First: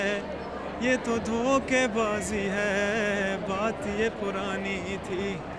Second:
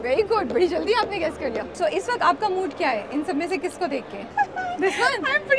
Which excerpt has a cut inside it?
second; 2 cuts; at 1.7 s, 4.2 s

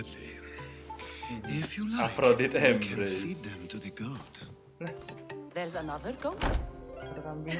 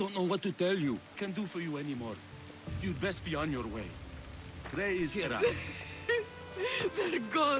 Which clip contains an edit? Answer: second; 1 cut; at 1.2 s

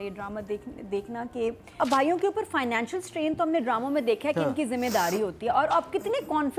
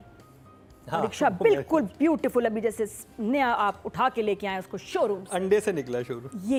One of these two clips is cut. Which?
first; 1 cut; at 1.6 s

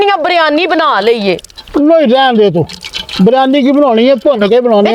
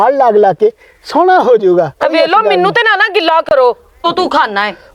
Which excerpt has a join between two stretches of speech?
second; 1 cut; at 4.0 s

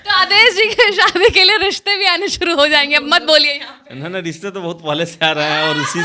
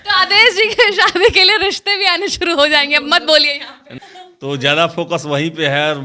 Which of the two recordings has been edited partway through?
second; 1 cut; at 4.0 s

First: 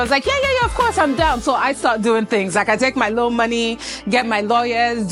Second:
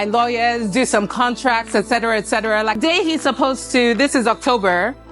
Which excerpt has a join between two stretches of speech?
second; 1 cut; at 2.8 s

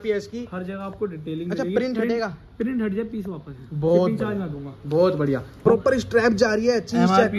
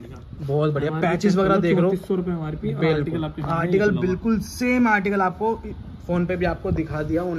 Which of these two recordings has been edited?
first; 1 cut; at 5.6 s

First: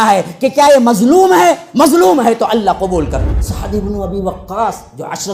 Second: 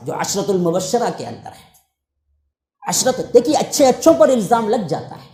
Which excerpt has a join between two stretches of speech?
first; 1 cut; at 3.2 s

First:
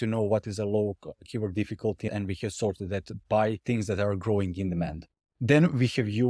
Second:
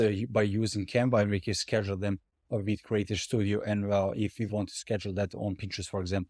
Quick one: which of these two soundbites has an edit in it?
first; 2 cuts; at 2.0 s, 3.6 s

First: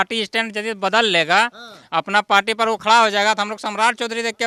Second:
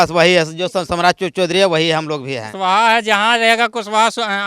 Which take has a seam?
second; 1 cut; at 2.5 s

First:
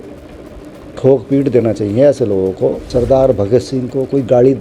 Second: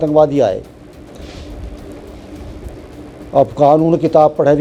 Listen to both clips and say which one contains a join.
first; 1 cut; at 2.8 s

